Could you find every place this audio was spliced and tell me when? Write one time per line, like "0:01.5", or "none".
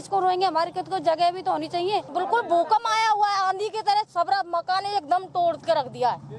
0:02.1

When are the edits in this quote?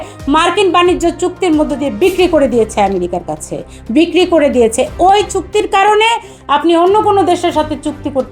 none

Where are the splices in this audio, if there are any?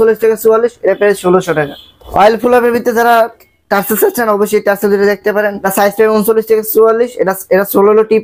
none

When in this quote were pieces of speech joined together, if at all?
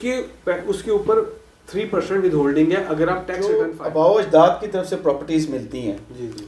0:03.4

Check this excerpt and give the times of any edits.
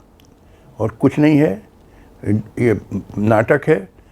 none

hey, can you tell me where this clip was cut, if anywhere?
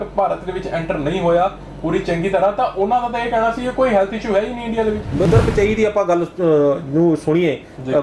0:05.3

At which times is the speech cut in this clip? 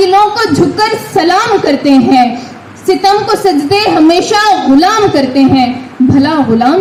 none

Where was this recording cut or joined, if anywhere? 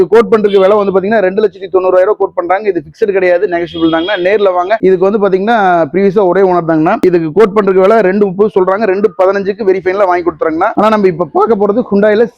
0:04.8

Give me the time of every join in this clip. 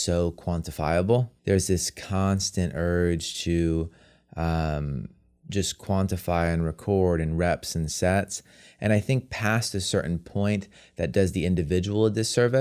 0:01.3

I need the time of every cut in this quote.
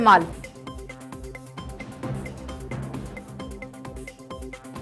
0:01.4
0:03.5

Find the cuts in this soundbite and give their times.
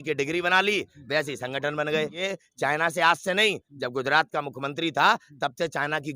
0:02.2

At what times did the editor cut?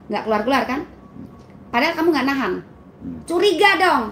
none

